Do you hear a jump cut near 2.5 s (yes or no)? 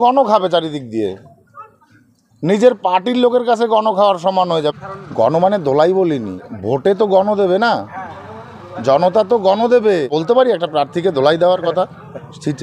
no